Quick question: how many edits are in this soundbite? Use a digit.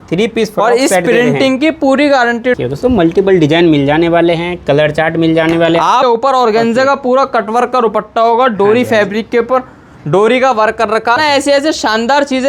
3